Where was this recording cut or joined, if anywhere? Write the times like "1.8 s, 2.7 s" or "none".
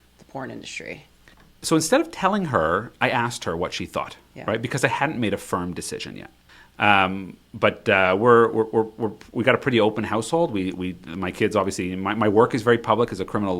none